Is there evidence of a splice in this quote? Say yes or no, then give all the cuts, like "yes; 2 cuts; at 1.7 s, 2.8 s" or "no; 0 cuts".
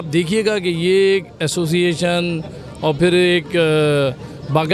no; 0 cuts